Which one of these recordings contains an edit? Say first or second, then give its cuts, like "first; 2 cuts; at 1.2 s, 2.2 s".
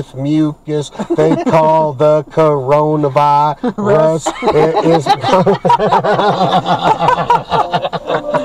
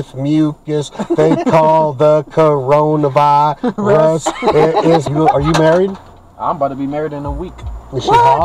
second; 1 cut; at 5.0 s